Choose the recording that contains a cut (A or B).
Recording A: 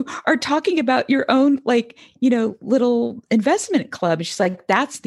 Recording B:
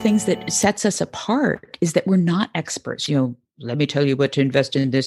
B